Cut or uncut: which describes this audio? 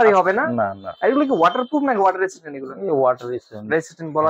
uncut